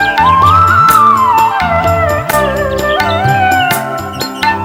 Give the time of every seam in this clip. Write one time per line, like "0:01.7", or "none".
none